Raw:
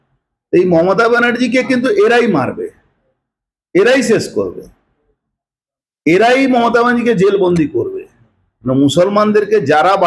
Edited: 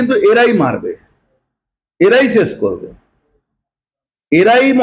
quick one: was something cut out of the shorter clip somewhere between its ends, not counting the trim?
no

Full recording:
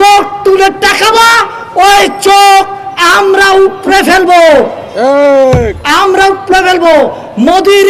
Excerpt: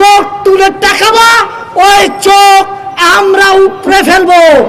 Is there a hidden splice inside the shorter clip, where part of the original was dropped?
no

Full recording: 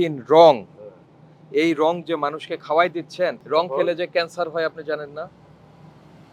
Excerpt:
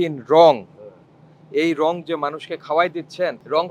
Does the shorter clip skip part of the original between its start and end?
no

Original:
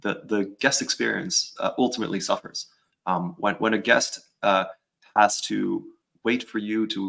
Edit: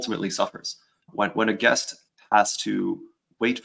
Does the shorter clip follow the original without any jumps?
no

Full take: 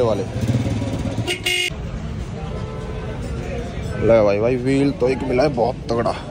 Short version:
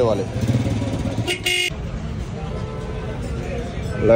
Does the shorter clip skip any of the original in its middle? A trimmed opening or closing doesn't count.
no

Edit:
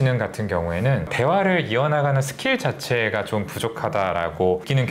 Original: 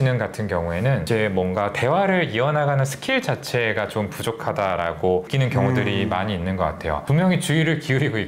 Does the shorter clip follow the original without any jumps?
no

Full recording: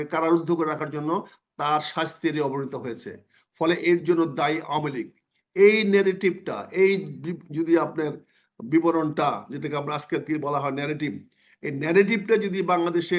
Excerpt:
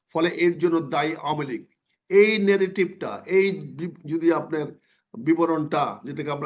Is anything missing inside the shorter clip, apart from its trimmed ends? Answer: no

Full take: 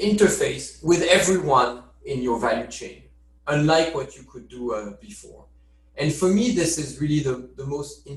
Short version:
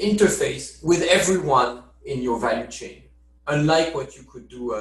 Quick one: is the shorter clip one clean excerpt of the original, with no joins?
yes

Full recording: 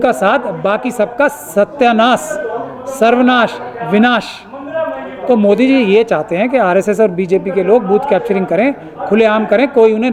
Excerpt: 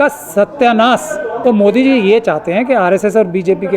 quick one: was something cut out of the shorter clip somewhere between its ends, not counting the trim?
yes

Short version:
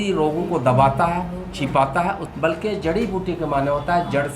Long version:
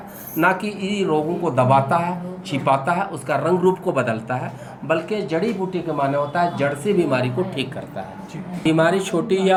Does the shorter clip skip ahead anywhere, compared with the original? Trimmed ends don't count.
yes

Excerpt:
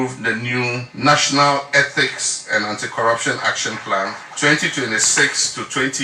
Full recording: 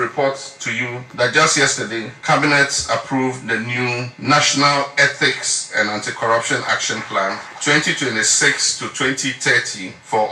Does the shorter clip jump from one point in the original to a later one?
no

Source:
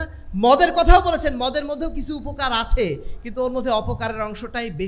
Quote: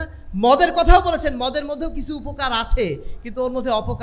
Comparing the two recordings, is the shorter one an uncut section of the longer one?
yes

